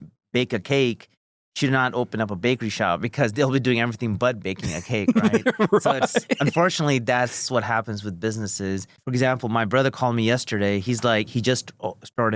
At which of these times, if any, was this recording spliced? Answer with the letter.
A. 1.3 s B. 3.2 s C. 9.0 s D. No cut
C